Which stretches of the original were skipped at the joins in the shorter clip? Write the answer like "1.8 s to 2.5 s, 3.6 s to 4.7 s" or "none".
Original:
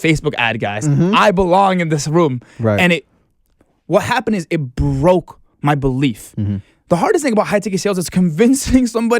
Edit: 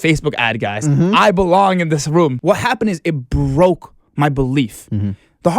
2.4 s to 3.8 s